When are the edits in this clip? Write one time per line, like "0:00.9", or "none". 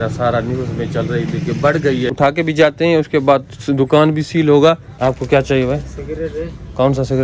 0:02.1
0:04.9